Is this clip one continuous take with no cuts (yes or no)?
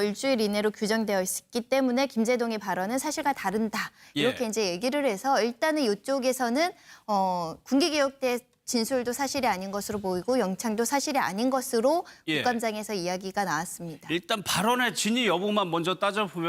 yes